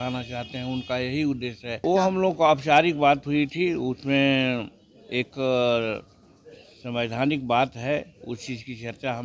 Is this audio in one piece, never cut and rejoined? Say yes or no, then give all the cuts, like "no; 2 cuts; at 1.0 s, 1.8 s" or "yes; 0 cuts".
no; 1 cut; at 1.8 s